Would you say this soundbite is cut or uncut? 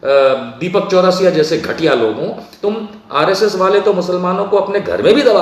cut